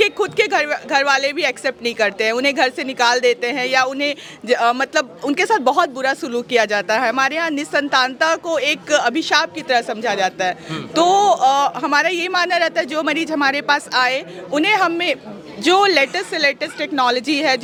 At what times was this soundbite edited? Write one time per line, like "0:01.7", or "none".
none